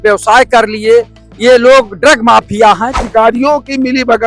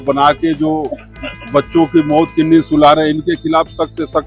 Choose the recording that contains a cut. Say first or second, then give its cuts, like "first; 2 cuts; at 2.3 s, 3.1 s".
first; 1 cut; at 3.0 s